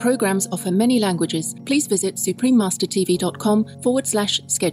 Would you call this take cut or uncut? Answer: cut